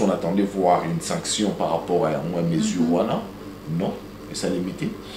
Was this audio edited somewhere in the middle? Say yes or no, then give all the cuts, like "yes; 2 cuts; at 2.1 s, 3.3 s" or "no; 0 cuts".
no; 0 cuts